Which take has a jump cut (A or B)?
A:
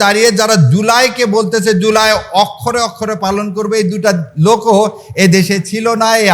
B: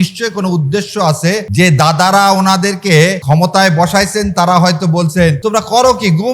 B